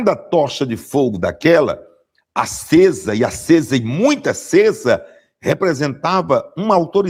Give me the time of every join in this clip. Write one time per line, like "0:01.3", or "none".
none

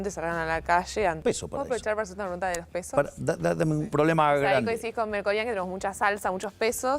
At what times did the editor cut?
0:01.2
0:03.9

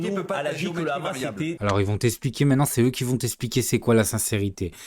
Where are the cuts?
0:01.6

